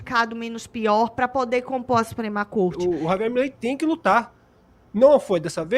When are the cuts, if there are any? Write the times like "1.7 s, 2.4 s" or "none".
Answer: 2.8 s